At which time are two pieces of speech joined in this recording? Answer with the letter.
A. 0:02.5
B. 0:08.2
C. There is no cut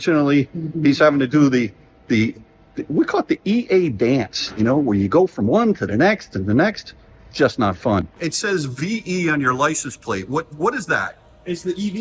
B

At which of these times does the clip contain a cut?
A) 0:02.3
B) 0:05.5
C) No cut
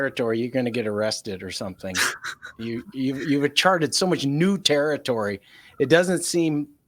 C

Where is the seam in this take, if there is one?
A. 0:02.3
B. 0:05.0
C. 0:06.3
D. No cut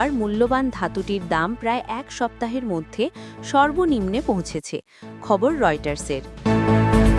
C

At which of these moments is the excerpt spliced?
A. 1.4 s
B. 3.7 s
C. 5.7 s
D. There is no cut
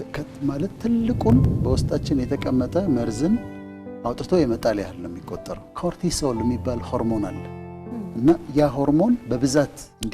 C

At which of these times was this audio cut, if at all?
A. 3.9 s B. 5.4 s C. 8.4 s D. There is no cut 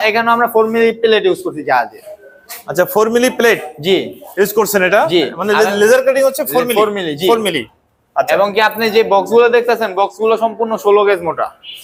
D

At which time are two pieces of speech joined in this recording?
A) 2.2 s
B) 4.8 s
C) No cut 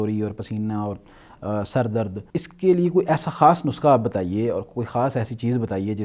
A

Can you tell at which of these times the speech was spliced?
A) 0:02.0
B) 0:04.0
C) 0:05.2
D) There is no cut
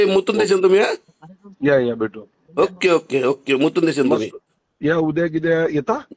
D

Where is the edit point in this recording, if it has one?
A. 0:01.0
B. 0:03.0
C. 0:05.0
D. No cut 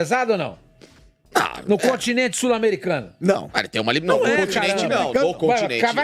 D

